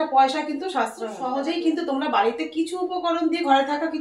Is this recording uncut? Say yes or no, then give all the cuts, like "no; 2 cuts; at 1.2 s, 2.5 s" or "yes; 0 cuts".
no; 1 cut; at 1.5 s